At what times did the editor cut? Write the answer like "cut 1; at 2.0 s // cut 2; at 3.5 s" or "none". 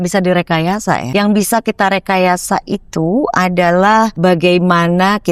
cut 1; at 1.0 s // cut 2; at 4.1 s